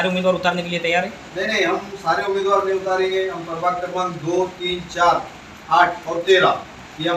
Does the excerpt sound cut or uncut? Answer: uncut